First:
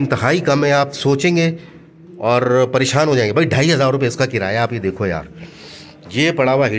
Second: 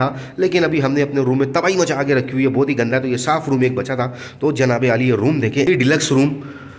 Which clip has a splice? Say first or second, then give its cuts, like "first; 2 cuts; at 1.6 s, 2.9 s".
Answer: second; 1 cut; at 5.7 s